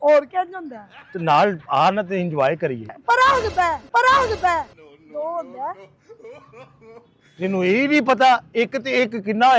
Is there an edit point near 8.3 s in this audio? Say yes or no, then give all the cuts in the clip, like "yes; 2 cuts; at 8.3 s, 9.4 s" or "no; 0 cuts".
no; 1 cut; at 3.0 s